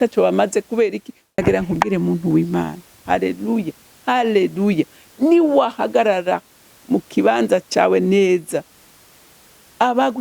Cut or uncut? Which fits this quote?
cut